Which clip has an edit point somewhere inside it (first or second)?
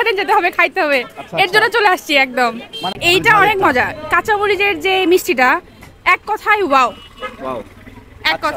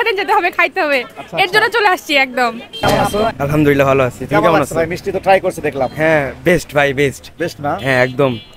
second